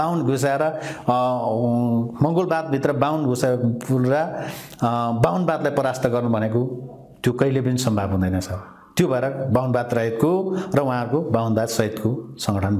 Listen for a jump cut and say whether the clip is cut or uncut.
uncut